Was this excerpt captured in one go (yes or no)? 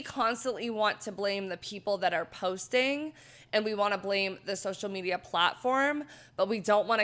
yes